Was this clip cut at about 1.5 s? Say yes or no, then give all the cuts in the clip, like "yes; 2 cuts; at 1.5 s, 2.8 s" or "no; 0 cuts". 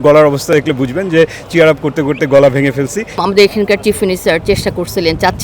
no; 1 cut; at 3.2 s